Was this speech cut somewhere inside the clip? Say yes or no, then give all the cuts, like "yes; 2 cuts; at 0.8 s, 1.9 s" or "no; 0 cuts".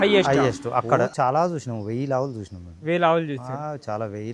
yes; 1 cut; at 1.1 s